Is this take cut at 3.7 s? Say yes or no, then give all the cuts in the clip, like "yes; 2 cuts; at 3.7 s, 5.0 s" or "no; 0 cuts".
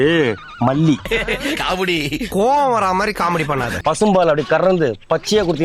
yes; 2 cuts; at 1.0 s, 3.7 s